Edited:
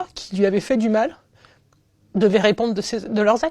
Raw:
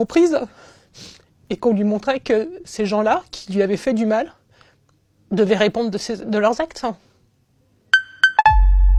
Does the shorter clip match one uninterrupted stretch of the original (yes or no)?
yes